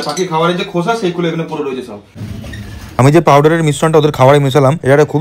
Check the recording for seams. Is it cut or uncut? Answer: cut